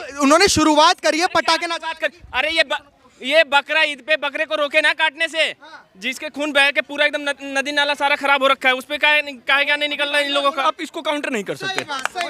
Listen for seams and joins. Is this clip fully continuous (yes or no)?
no